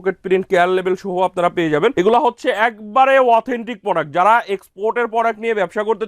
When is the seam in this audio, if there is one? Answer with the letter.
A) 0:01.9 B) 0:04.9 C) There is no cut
A